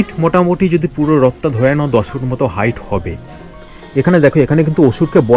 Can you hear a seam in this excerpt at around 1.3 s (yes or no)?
no